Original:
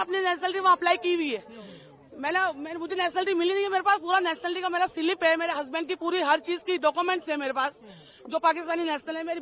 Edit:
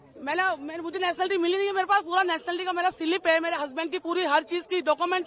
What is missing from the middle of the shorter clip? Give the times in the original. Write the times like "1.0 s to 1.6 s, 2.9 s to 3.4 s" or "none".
none